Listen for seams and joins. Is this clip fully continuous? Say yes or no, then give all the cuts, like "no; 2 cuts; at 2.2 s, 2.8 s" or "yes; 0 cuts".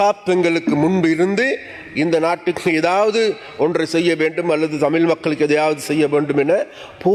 yes; 0 cuts